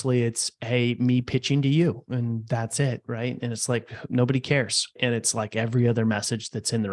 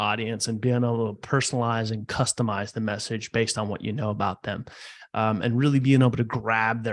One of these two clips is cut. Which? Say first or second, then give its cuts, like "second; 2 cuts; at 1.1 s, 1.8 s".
first; 1 cut; at 5.0 s